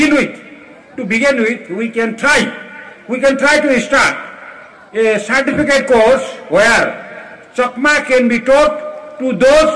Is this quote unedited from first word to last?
yes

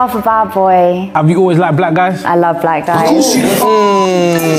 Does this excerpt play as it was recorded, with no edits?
yes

